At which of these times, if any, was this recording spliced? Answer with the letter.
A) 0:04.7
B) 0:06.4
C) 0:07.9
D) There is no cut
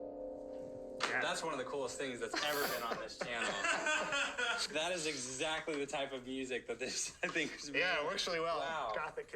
A